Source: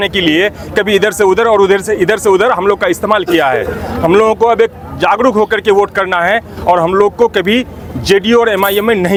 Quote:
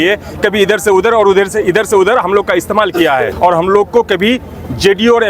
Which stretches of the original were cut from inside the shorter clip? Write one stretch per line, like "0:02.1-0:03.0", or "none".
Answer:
0:03.7-0:06.6